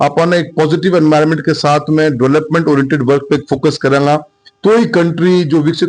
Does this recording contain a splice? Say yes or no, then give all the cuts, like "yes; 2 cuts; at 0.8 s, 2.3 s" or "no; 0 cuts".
no; 0 cuts